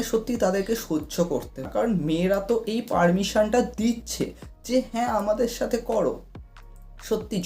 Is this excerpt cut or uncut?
cut